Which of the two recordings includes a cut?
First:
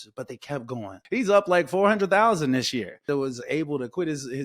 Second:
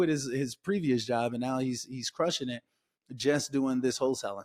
first; 2 cuts; at 0.9 s, 3.1 s

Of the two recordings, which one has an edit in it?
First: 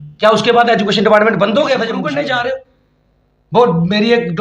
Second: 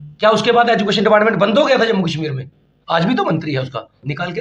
first; 1 cut; at 2.0 s

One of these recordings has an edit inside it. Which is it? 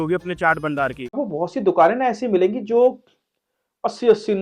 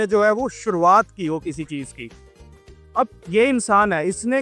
first; 1 cut; at 1.1 s

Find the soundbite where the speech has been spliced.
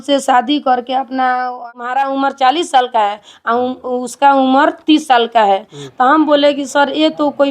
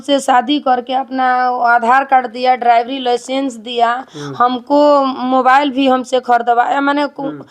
first; 1 cut; at 1.6 s

